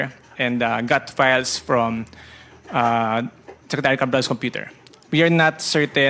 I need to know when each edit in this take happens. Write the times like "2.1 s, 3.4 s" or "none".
none